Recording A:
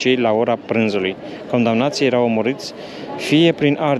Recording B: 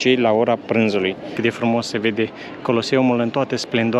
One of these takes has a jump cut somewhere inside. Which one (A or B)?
B